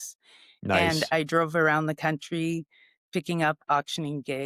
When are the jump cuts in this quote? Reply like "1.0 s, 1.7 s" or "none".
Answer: none

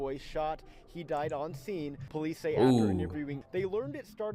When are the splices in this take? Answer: 2.0 s, 3.4 s

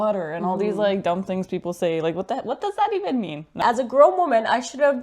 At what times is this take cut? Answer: 3.6 s

